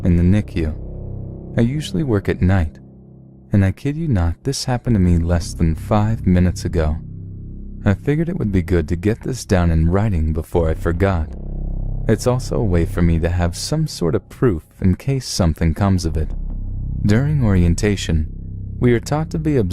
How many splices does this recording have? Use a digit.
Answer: 1